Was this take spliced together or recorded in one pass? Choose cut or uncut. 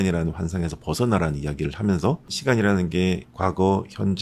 cut